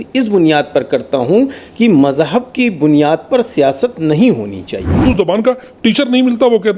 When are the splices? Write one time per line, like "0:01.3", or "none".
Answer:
0:05.0